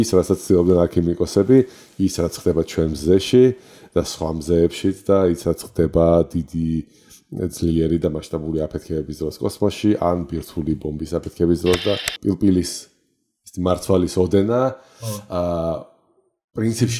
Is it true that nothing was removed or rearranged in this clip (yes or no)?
no